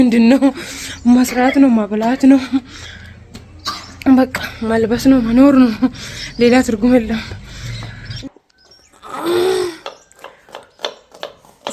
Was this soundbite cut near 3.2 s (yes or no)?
no